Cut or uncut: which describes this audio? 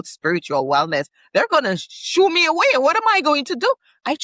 uncut